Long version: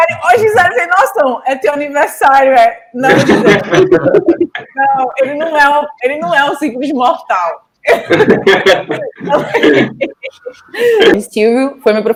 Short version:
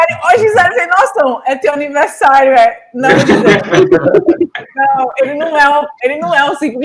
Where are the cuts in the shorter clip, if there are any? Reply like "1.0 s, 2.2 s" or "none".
none